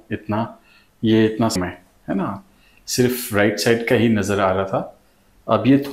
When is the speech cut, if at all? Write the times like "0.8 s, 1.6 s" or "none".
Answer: 1.6 s